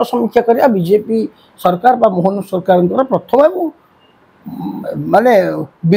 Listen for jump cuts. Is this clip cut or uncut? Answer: uncut